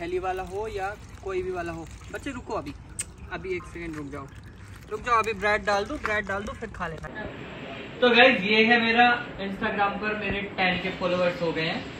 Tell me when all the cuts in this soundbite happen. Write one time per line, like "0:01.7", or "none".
0:07.1

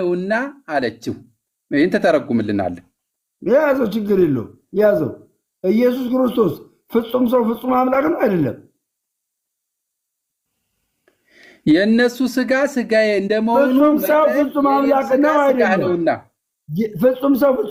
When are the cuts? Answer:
none

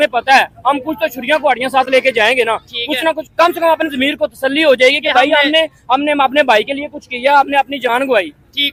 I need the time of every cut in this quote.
none

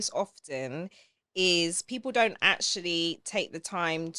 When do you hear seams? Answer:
none

